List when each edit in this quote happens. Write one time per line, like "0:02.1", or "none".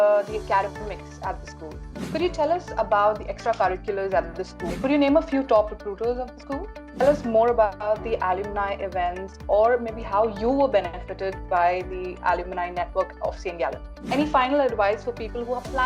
0:02.0
0:04.7
0:07.0
0:14.0